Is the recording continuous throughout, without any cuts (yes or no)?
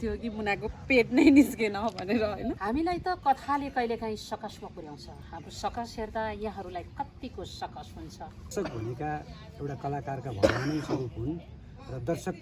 no